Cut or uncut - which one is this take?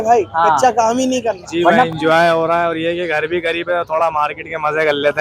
cut